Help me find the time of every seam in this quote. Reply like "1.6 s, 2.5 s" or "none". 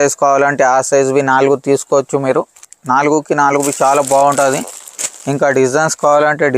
2.7 s